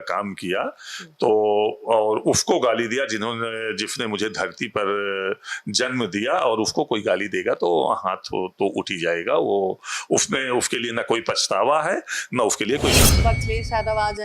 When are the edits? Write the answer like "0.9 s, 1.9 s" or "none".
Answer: 13.2 s